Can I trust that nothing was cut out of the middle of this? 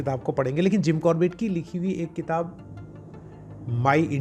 yes; 0 cuts

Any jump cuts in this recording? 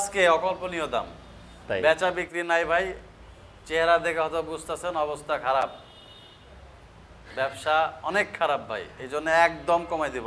no; 0 cuts

